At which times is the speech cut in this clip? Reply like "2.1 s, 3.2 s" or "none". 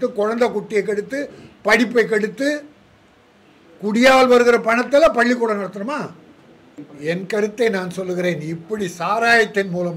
6.8 s